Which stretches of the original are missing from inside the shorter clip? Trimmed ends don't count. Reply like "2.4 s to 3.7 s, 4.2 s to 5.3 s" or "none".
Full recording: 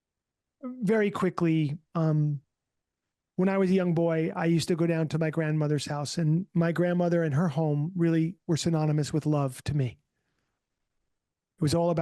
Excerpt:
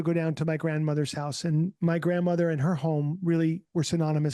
none